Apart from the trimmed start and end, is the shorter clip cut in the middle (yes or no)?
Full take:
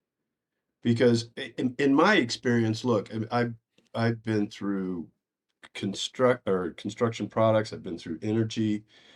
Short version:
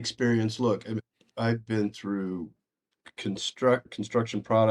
yes